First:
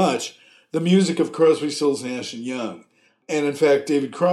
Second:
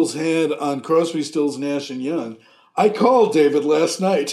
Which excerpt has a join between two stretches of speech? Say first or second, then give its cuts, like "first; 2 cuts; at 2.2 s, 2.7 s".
first; 1 cut; at 3.2 s